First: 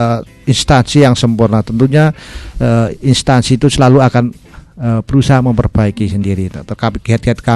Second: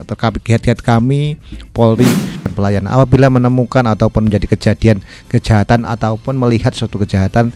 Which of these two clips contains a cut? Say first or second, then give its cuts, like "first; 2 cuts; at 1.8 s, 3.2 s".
second; 1 cut; at 2.5 s